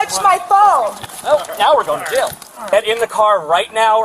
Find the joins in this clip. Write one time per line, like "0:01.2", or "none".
0:02.5